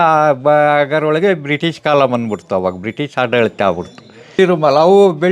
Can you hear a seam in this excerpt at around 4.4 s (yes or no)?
yes